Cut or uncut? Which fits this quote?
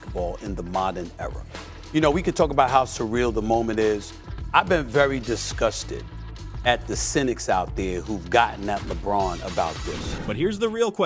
uncut